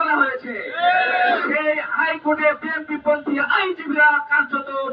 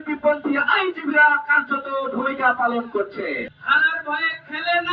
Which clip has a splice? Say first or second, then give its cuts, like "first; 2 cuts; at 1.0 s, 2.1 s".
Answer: second; 1 cut; at 3.5 s